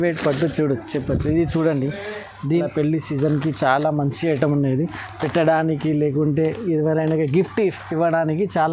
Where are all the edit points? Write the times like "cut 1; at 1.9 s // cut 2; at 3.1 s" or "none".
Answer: cut 1; at 2.6 s